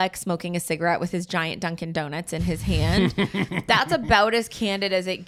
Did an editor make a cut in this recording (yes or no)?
no